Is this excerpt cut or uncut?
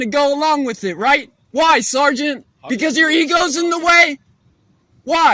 cut